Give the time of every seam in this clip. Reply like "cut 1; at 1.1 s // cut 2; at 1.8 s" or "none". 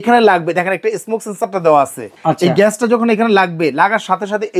cut 1; at 2.1 s